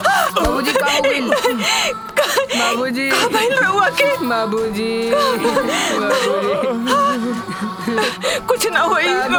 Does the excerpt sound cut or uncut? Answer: uncut